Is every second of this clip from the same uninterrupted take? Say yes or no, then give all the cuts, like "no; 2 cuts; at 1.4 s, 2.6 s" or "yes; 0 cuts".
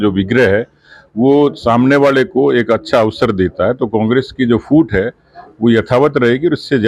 yes; 0 cuts